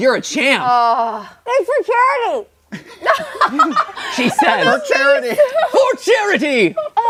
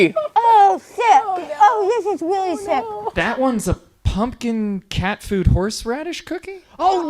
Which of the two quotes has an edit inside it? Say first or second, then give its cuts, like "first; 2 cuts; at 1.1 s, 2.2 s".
second; 1 cut; at 3.0 s